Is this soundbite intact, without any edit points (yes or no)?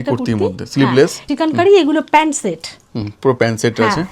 no